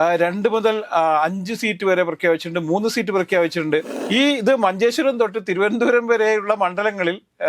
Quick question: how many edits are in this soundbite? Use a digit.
1